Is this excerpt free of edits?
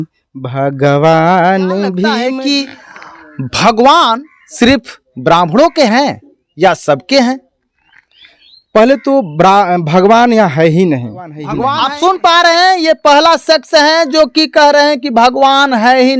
no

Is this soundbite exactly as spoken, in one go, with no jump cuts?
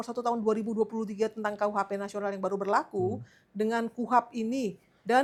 yes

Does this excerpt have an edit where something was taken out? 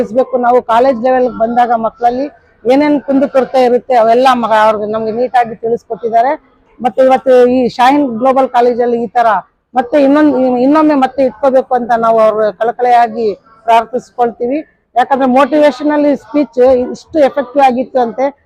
no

